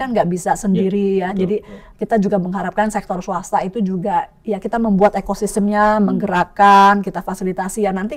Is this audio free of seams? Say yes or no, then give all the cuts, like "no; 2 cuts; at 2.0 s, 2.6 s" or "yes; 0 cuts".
yes; 0 cuts